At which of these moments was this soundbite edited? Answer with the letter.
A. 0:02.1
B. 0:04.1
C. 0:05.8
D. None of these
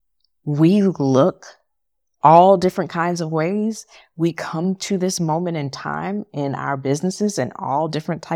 D